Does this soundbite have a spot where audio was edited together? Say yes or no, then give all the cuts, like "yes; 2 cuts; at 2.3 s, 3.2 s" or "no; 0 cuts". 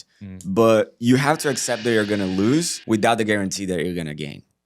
yes; 1 cut; at 2.7 s